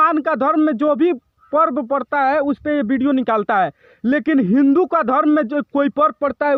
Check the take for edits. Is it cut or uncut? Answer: uncut